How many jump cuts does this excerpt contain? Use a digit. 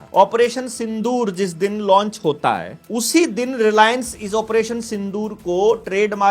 1